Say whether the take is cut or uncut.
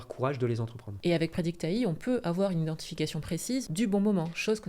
cut